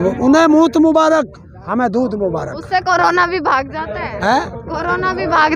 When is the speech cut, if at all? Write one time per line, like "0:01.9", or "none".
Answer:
none